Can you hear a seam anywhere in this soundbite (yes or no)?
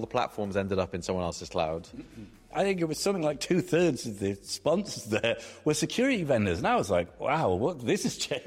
yes